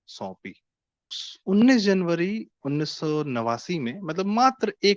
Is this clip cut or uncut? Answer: cut